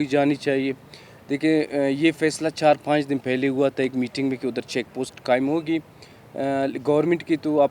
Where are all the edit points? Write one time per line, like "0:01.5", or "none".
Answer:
none